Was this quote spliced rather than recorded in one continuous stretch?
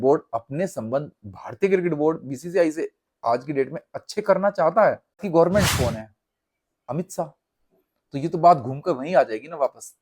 yes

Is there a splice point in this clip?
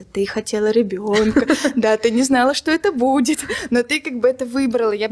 no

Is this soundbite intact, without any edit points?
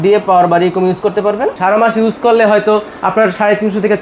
no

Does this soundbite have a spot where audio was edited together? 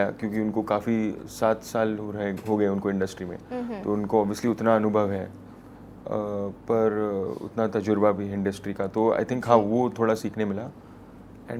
no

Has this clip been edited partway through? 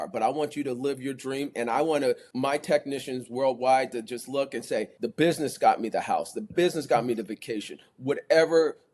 yes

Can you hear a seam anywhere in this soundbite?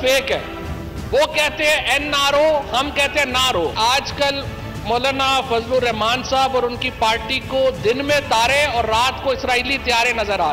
yes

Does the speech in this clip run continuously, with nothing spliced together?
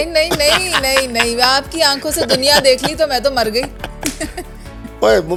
yes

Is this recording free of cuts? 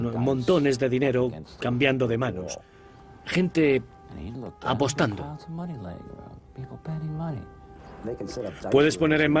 yes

